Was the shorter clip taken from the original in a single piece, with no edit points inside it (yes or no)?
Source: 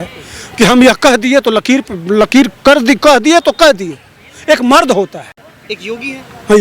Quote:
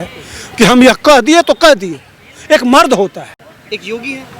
no